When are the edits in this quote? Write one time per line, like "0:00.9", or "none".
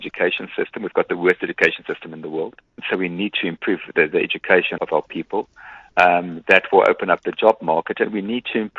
0:02.7
0:04.8